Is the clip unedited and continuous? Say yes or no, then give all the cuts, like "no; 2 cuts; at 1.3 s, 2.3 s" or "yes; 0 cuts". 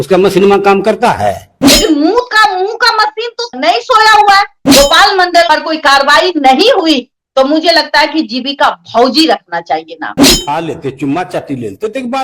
no; 2 cuts; at 4.6 s, 10.2 s